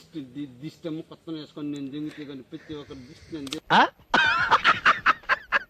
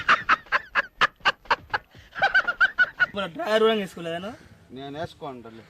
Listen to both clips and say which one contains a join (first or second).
second